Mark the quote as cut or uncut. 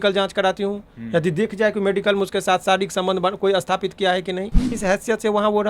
cut